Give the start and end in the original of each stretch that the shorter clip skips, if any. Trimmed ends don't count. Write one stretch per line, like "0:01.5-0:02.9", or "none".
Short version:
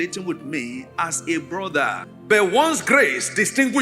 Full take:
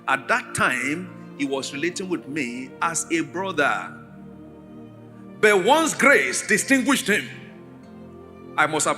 0:03.9-0:05.2